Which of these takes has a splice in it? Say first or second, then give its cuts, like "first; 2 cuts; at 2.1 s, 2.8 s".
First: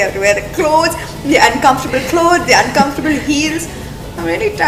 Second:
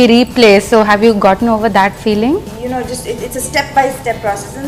second; 1 cut; at 2.5 s